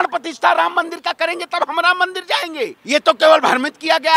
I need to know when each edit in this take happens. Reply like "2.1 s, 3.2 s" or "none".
2.8 s